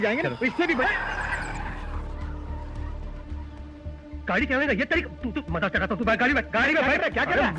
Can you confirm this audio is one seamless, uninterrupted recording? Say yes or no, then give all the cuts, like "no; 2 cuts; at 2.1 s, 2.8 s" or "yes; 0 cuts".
yes; 0 cuts